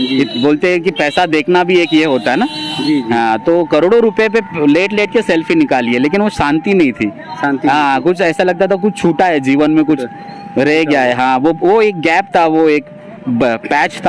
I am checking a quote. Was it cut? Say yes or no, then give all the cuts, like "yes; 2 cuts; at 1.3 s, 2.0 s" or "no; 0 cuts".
no; 0 cuts